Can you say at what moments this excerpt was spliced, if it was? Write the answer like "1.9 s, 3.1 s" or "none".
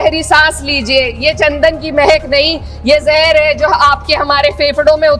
none